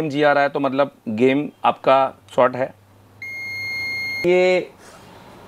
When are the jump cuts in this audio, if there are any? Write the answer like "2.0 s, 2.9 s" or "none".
4.2 s